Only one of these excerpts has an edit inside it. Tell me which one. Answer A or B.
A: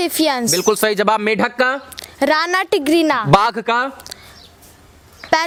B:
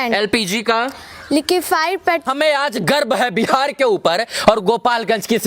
B